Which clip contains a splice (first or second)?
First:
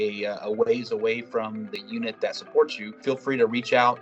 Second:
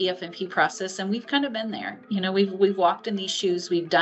first